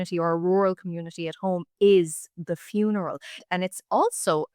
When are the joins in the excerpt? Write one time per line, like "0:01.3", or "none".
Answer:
0:03.4